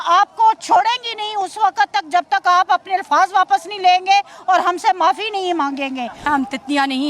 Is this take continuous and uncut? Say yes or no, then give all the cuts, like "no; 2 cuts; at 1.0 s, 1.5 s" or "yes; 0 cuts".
yes; 0 cuts